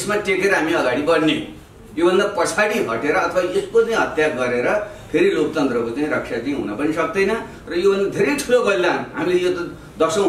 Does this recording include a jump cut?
no; 0 cuts

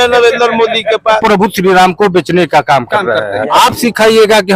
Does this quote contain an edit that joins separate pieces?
yes; 2 cuts; at 1.2 s, 3.4 s

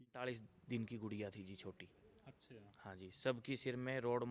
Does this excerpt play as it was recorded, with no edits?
yes; 0 cuts

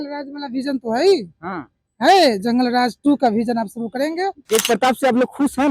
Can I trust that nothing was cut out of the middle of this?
no; 1 cut; at 4.4 s

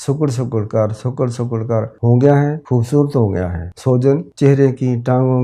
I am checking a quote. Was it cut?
yes; 4 cuts; at 1.9 s, 2.6 s, 3.6 s, 4.3 s

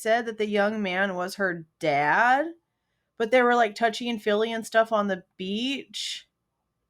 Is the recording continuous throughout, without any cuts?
yes; 0 cuts

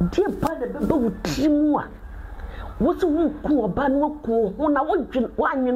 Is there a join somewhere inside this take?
no; 0 cuts

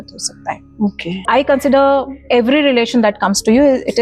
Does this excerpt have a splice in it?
yes; 1 cut; at 1.1 s

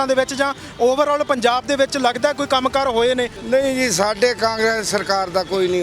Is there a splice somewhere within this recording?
yes; 1 cut; at 3.4 s

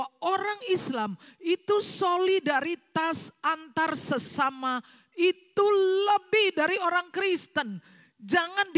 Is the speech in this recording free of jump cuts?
yes; 0 cuts

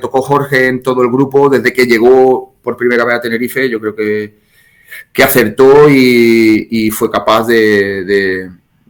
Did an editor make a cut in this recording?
no; 0 cuts

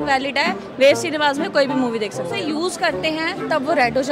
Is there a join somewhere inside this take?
yes; 1 cut; at 2.5 s

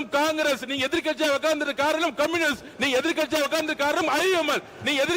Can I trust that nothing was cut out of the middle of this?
yes; 0 cuts

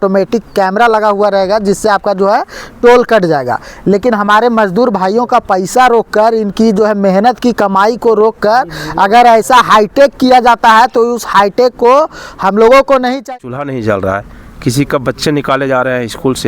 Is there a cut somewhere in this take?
yes; 1 cut; at 13.2 s

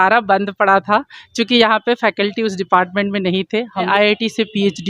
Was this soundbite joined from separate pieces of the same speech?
yes; 1 cut; at 3.9 s

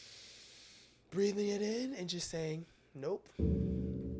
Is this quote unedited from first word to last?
yes; 0 cuts

